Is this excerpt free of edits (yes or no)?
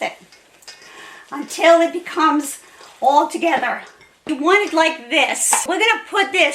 no